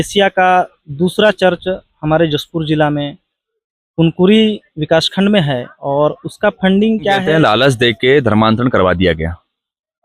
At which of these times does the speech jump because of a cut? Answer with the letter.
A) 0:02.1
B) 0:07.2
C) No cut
B